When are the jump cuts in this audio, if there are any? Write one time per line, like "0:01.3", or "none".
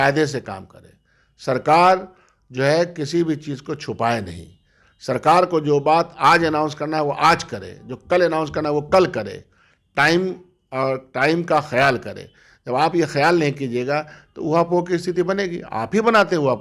none